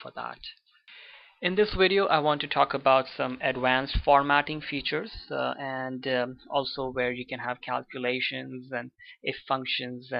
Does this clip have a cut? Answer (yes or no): yes